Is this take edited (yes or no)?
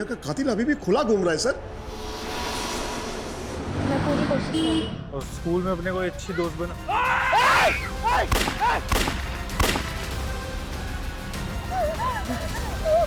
no